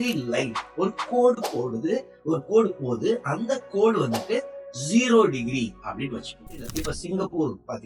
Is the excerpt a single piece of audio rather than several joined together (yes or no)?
no